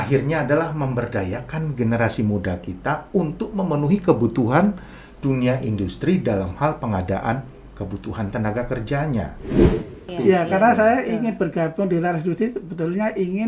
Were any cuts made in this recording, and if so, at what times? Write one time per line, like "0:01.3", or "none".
0:09.6